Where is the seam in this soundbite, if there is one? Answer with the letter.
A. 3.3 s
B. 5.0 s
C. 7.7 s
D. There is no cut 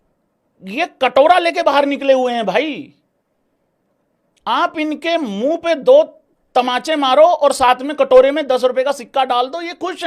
D